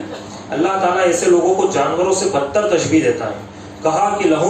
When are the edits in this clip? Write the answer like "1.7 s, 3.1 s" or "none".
none